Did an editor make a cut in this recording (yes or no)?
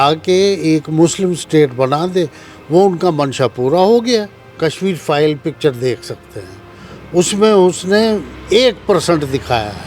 yes